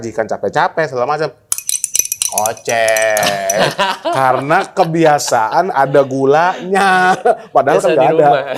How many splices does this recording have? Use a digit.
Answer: 0